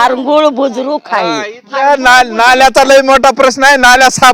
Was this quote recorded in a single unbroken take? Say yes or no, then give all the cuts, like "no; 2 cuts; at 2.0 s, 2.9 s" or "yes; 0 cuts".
yes; 0 cuts